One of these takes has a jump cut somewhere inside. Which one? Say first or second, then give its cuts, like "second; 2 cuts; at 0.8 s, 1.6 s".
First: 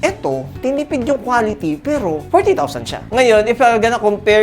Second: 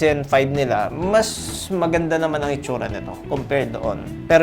first; 1 cut; at 3.0 s